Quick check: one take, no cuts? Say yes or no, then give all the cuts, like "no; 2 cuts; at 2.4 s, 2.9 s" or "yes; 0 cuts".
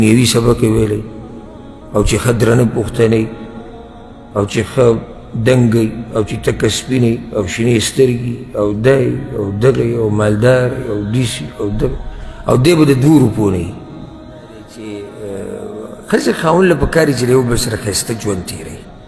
no; 1 cut; at 14.7 s